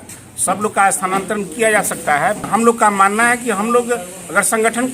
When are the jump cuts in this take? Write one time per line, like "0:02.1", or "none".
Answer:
0:02.5